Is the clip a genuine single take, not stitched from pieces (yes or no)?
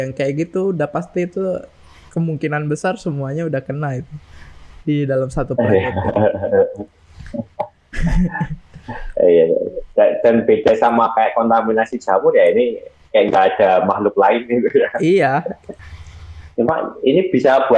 no